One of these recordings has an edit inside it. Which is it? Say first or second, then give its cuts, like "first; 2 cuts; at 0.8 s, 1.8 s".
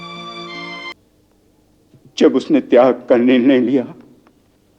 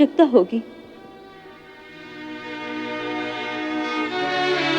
first; 1 cut; at 0.9 s